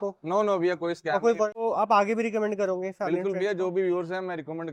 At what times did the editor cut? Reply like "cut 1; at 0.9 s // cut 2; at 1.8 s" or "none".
none